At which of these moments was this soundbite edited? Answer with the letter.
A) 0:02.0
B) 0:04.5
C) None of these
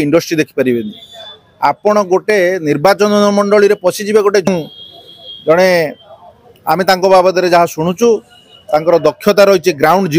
B